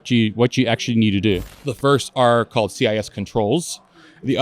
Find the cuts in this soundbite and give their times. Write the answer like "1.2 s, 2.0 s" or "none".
1.5 s

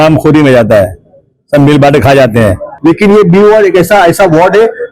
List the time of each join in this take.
2.7 s

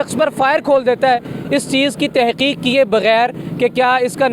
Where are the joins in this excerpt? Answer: none

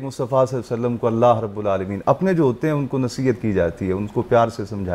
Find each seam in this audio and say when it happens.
none

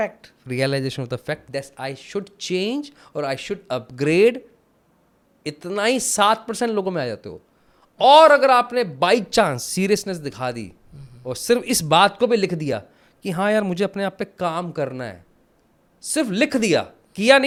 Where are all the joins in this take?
none

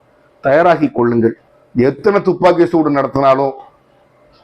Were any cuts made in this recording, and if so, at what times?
1.5 s

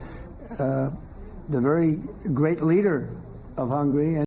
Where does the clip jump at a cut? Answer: none

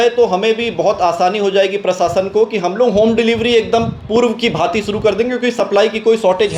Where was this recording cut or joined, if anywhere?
none

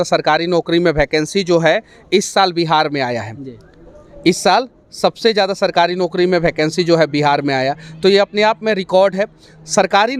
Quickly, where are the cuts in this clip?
none

